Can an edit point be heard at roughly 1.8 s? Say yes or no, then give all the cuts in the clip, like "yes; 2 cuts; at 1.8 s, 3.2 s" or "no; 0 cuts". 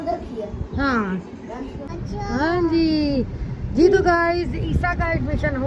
yes; 1 cut; at 1.8 s